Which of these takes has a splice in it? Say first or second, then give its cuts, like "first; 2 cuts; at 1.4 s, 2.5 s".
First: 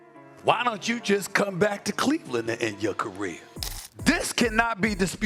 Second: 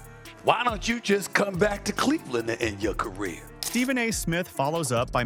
first; 1 cut; at 3.7 s